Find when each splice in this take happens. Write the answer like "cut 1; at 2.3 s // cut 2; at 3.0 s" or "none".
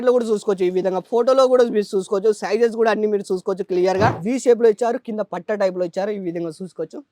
cut 1; at 4.2 s